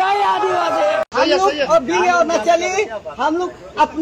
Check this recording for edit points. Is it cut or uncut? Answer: cut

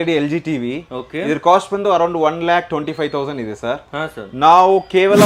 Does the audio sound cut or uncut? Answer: uncut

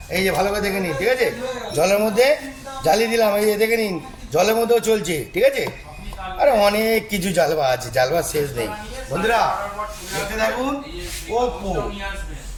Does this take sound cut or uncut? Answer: uncut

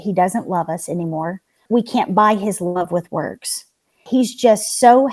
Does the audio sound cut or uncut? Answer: cut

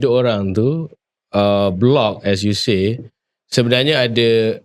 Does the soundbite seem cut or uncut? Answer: uncut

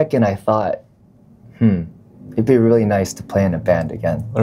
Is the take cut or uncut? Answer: uncut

